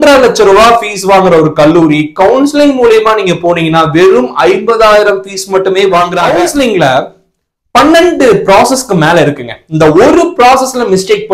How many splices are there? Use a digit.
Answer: 1